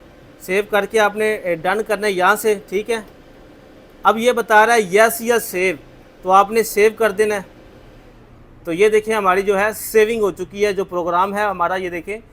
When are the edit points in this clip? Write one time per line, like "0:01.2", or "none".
none